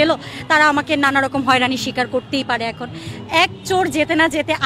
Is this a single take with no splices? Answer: yes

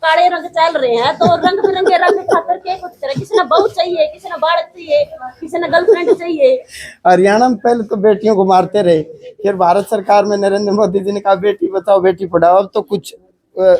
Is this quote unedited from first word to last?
yes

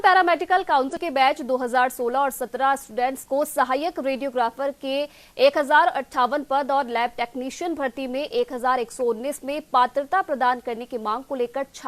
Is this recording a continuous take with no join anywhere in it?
no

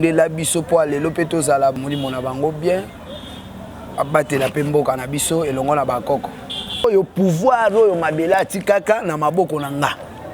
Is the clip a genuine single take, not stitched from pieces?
no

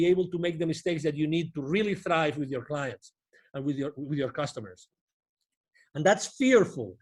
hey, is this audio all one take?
yes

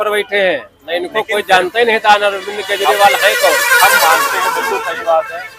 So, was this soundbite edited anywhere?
no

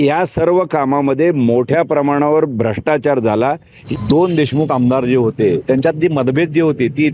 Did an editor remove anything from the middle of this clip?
yes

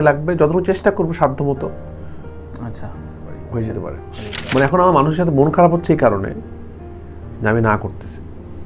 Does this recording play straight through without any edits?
no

